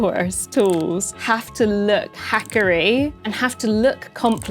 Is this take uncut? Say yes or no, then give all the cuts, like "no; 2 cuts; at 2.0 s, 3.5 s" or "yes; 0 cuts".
no; 1 cut; at 1.1 s